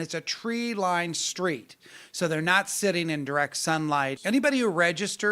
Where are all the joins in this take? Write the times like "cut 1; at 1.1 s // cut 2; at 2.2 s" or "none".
cut 1; at 4.2 s

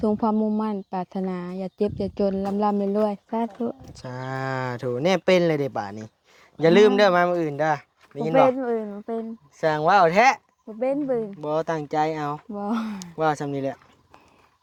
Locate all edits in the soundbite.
none

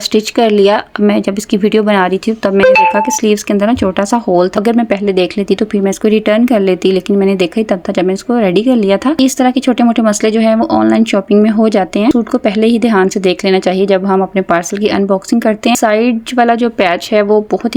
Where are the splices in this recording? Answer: cut 1; at 4.5 s // cut 2; at 9.2 s // cut 3; at 12.1 s // cut 4; at 15.7 s

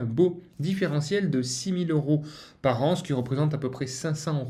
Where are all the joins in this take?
none

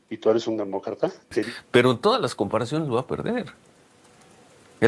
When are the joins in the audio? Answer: cut 1; at 1.5 s

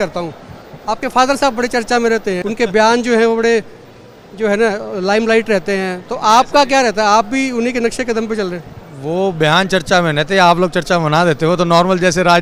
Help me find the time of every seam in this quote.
none

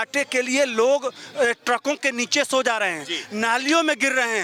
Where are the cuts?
none

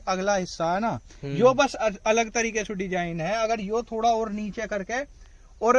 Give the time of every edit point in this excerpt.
none

